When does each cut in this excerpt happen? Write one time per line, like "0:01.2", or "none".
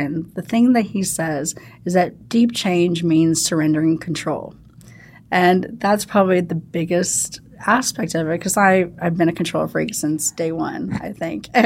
none